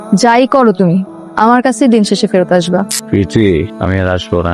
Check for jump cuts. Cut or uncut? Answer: cut